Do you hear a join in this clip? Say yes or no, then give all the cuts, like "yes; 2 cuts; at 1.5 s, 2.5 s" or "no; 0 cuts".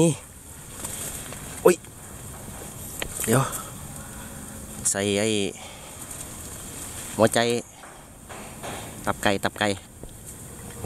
no; 0 cuts